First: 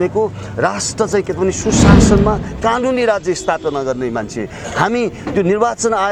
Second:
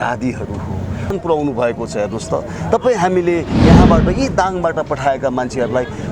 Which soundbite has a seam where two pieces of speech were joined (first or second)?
second